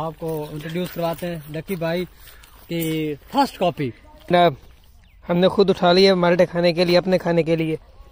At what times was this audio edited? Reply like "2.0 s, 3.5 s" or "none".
4.3 s